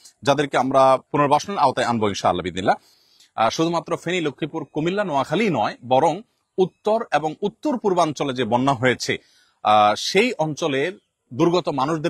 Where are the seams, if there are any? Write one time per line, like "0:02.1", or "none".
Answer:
0:01.1
0:03.0